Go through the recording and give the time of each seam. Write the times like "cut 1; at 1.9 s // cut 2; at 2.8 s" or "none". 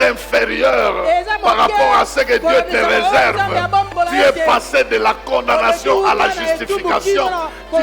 cut 1; at 3.9 s